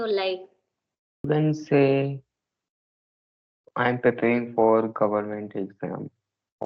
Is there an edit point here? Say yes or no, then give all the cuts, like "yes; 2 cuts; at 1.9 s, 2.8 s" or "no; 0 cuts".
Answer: yes; 1 cut; at 1.3 s